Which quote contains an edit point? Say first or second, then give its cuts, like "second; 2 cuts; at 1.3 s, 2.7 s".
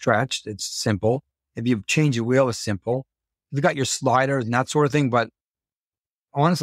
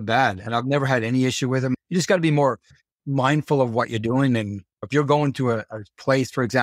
second; 1 cut; at 1.8 s